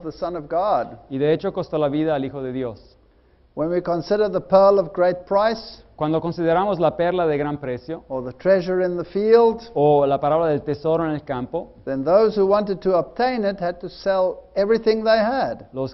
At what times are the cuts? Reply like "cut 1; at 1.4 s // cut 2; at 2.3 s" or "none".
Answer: cut 1; at 6.7 s